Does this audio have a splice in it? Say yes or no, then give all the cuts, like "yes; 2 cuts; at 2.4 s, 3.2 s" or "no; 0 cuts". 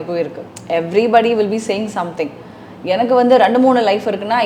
no; 0 cuts